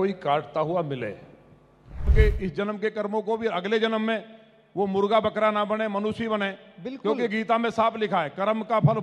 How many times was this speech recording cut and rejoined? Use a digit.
1